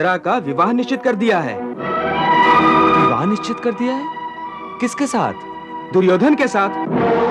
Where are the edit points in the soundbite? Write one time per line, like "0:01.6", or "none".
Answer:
none